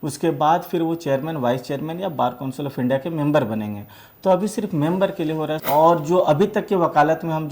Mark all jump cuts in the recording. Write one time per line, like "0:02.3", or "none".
0:05.6